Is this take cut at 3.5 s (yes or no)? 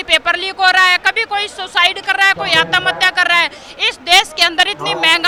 no